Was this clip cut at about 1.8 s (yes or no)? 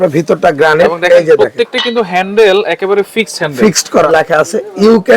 no